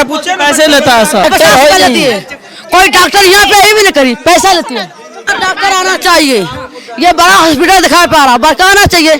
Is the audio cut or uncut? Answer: cut